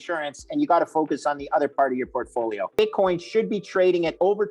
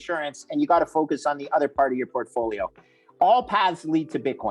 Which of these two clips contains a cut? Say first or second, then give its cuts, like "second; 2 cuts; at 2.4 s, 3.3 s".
first; 1 cut; at 2.7 s